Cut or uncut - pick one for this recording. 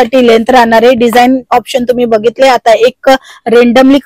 uncut